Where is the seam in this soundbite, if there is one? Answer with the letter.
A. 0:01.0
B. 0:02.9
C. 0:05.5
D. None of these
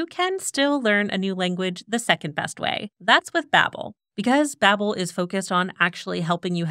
B